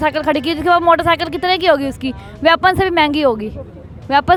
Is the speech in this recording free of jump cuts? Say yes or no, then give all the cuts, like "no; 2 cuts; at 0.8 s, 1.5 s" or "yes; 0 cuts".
yes; 0 cuts